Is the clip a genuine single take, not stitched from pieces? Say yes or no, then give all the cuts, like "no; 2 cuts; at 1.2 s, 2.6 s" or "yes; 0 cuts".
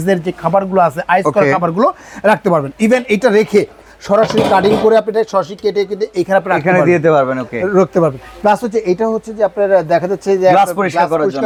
yes; 0 cuts